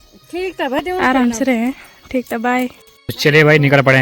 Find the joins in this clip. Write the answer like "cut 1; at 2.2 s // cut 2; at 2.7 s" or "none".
cut 1; at 3.1 s